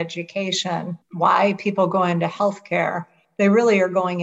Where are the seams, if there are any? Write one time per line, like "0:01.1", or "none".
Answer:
0:01.0